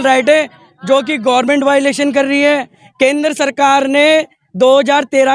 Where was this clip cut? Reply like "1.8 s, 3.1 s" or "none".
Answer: 2.8 s